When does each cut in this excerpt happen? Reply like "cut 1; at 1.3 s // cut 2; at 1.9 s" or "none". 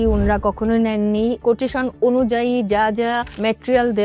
cut 1; at 1.4 s